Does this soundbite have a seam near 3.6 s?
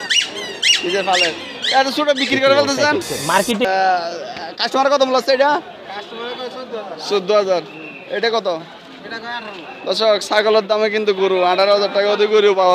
yes; 1 cut; at 3.6 s

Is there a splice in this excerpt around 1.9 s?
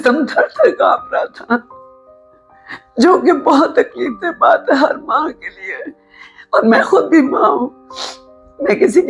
no; 0 cuts

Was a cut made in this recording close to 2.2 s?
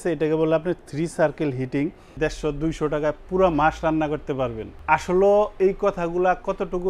yes; 2 cuts; at 2.2 s, 4.7 s

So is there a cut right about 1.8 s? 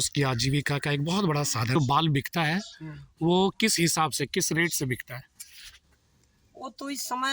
yes; 1 cut; at 1.8 s

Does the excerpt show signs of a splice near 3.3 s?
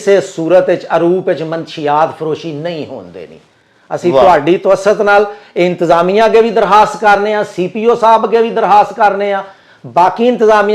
no; 0 cuts

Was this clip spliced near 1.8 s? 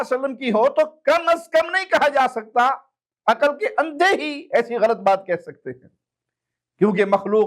no; 0 cuts

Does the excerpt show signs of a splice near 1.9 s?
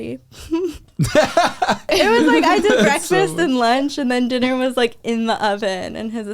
yes; 1 cut; at 1.9 s

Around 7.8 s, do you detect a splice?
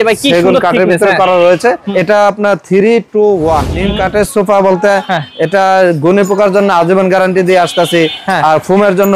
no; 2 cuts; at 1.9 s, 3.8 s

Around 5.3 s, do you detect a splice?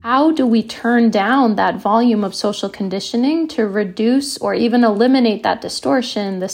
no; 0 cuts

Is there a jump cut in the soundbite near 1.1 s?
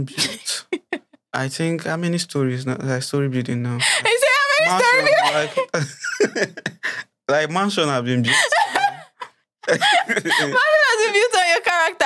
no; 0 cuts

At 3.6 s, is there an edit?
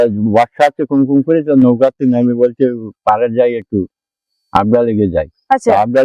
no; 0 cuts

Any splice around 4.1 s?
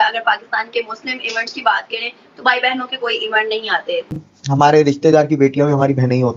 yes; 1 cut; at 4.1 s

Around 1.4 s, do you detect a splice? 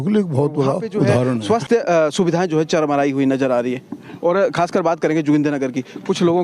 yes; 1 cut; at 1.4 s

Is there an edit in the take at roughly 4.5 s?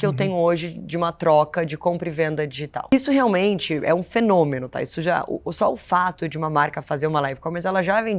no; 1 cut; at 2.9 s

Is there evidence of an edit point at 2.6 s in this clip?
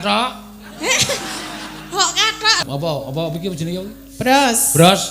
yes; 1 cut; at 2.6 s

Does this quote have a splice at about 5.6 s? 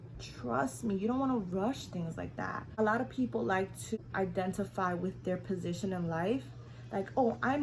no; 2 cuts; at 2.7 s, 4.0 s

